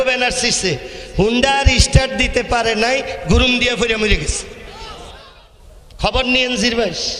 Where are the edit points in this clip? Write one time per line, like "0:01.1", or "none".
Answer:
0:05.3